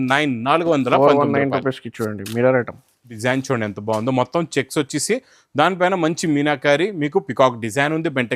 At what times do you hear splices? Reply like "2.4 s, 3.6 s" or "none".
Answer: 3.1 s